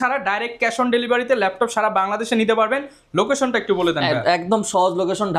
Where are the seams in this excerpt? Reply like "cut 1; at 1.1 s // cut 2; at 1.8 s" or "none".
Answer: none